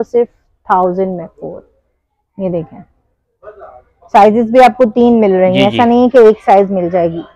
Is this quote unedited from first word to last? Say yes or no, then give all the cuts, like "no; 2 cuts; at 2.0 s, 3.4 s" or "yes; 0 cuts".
yes; 0 cuts